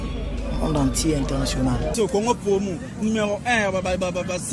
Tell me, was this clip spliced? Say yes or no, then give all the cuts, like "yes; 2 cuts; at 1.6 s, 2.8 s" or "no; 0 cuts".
yes; 1 cut; at 1.9 s